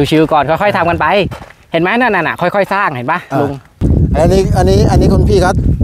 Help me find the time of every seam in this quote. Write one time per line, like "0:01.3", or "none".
0:03.8